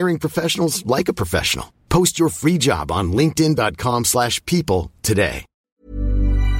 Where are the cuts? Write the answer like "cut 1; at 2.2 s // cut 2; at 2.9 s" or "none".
cut 1; at 5.5 s